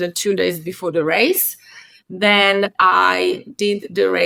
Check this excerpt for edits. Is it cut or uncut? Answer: uncut